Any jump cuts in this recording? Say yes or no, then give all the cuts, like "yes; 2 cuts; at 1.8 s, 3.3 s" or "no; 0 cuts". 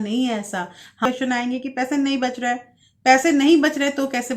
yes; 1 cut; at 1.0 s